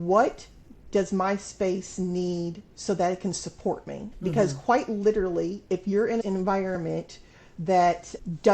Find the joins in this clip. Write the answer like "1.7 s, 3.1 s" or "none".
6.2 s

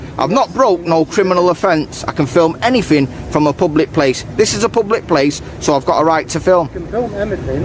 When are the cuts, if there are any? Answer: none

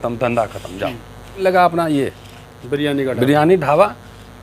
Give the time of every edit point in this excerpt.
1.4 s

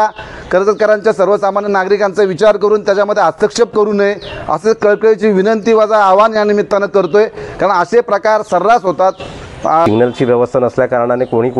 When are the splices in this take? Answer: 9.8 s

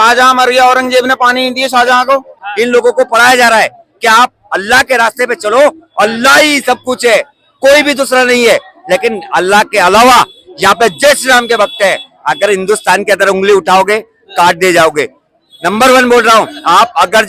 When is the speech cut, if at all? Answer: 2.4 s

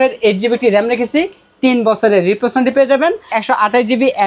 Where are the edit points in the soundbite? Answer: 3.4 s

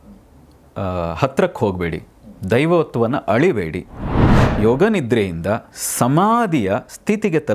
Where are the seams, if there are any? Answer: 4.4 s

